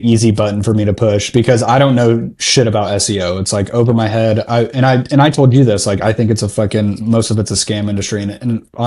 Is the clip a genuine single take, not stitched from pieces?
yes; 0 cuts

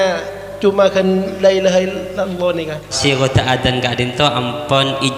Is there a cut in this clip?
yes; 1 cut; at 3.0 s

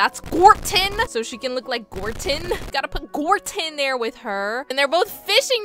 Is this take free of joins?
no; 1 cut; at 2.6 s

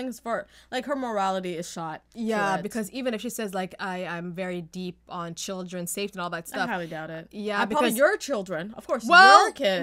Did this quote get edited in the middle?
yes; 1 cut; at 2.1 s

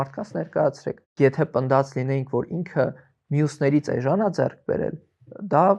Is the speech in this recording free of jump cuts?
no; 1 cut; at 1.1 s

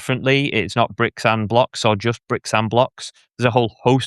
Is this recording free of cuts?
yes; 0 cuts

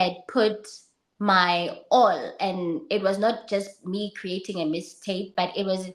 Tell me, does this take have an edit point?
no; 0 cuts

